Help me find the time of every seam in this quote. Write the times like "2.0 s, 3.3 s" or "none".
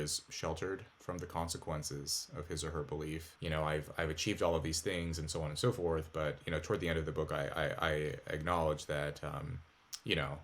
3.3 s